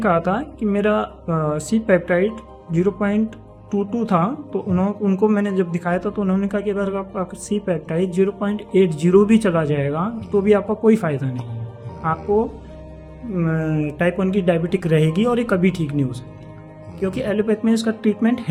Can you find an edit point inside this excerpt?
no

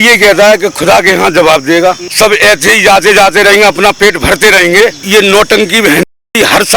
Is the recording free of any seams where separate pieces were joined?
no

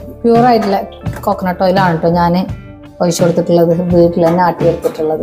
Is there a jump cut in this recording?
no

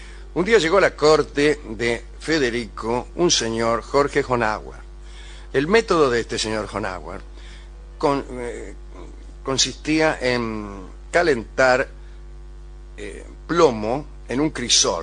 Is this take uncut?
yes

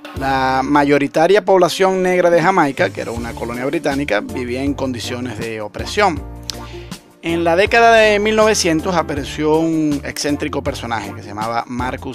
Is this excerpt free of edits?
no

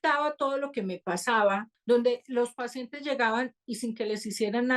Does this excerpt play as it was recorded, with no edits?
no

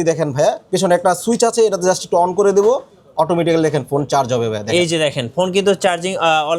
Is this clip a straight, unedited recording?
yes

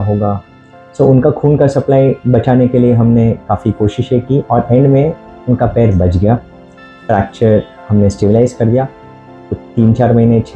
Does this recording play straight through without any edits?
yes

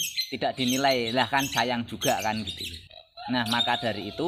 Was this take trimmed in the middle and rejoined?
no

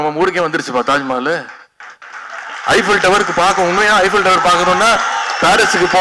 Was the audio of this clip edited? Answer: no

